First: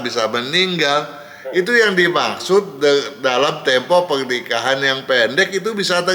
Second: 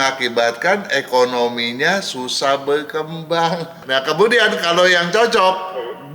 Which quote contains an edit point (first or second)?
second